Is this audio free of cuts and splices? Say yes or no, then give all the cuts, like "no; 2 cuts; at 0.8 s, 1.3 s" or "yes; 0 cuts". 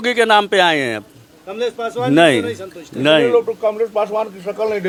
yes; 0 cuts